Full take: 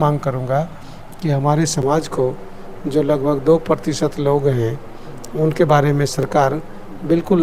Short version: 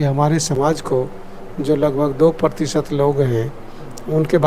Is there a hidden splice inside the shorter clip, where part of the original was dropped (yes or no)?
no